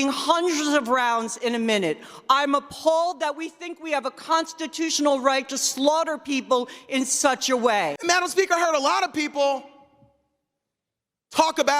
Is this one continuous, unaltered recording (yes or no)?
no